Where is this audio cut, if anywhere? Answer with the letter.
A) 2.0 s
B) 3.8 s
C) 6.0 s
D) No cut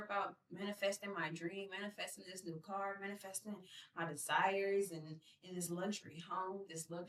D